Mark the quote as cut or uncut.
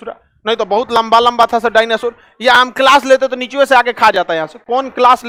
uncut